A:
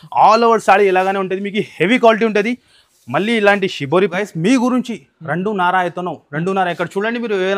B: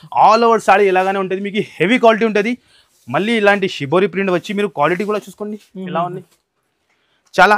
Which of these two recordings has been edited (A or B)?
A